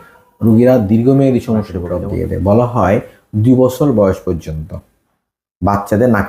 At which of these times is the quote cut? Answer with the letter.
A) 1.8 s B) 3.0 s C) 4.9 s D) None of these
A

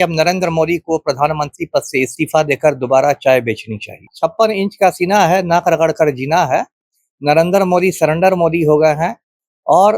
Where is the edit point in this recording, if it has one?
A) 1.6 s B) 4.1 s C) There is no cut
B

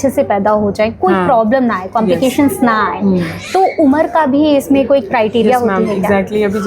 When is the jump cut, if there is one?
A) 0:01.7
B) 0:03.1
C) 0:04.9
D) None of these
D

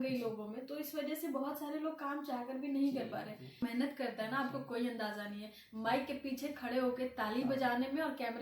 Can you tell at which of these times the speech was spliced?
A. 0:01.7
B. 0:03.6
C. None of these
B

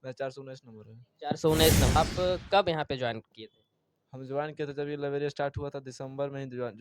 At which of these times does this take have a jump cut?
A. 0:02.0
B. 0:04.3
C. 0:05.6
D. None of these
A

